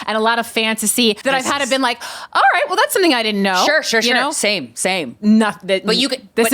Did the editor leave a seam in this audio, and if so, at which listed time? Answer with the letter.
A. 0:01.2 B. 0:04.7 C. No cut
A